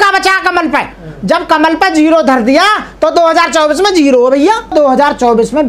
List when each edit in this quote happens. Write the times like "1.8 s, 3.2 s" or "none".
4.7 s